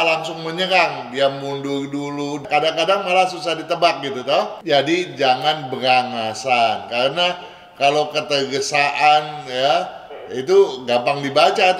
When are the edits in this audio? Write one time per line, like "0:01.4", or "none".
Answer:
0:02.4
0:04.6